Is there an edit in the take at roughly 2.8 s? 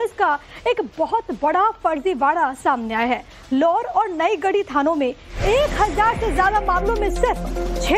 yes; 1 cut; at 2.8 s

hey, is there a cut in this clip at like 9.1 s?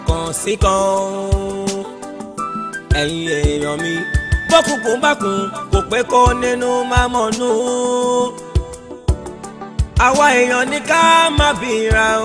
no; 0 cuts

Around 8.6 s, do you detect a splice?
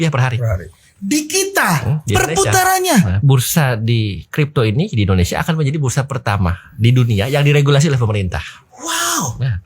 no; 1 cut; at 3.1 s

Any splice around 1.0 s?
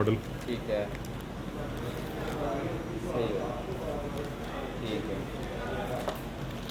no; 0 cuts

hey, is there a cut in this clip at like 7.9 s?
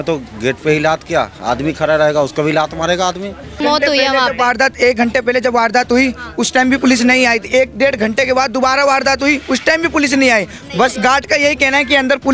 no; 1 cut; at 3.6 s

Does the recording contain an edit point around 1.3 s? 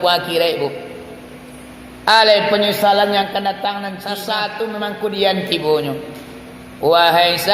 no; 1 cut; at 4.1 s

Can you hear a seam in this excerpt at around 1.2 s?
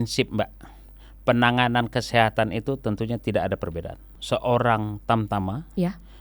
no; 1 cut; at 4.1 s

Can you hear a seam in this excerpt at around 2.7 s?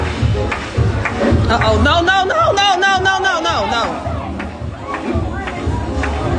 no; 0 cuts

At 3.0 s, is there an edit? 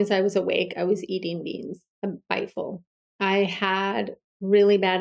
yes; 2 cuts; at 1.8 s, 3.0 s

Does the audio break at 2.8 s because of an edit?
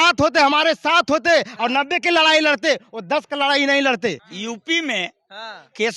no; 1 cut; at 4.3 s

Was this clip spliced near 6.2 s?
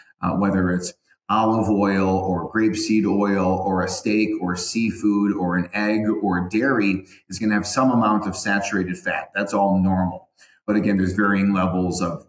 no; 1 cut; at 10.6 s

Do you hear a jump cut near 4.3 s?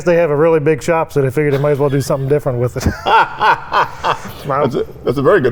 no; 0 cuts

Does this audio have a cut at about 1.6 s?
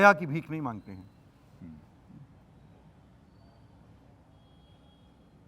no; 0 cuts

